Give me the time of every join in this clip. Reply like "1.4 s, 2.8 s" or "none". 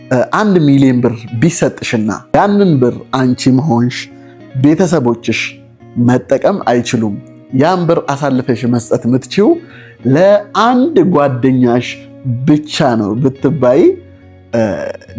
2.3 s